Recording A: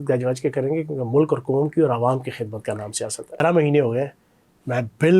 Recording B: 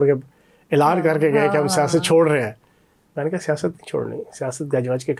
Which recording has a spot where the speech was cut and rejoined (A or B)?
A